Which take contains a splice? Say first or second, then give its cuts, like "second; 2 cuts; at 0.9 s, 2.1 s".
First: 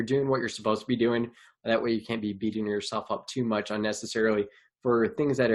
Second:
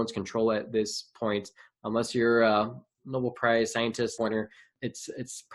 second; 1 cut; at 4.1 s